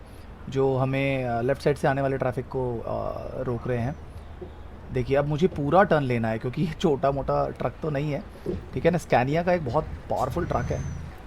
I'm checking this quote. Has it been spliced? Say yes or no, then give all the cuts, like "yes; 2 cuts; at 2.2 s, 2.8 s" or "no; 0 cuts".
no; 0 cuts